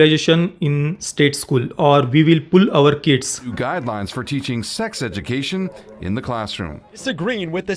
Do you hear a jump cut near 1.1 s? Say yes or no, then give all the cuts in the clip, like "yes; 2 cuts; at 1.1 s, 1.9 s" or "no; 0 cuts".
no; 2 cuts; at 3.5 s, 7.0 s